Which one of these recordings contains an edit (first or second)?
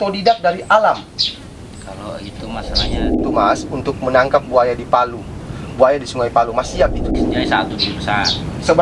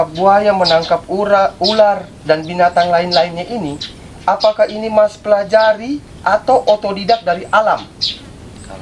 first